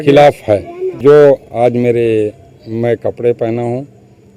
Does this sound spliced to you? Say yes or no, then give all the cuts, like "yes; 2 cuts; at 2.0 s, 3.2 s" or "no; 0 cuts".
yes; 1 cut; at 1.0 s